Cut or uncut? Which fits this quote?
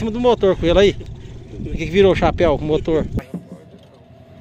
cut